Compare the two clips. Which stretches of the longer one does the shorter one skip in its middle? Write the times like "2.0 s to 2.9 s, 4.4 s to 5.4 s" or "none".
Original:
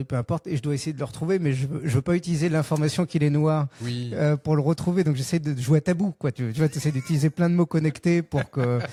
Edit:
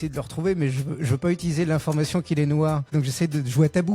3.8 s to 5.1 s